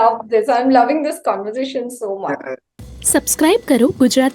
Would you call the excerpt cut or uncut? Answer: cut